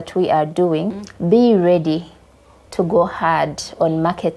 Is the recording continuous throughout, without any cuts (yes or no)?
no